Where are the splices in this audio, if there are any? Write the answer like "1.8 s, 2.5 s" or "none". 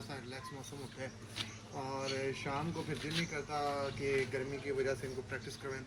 none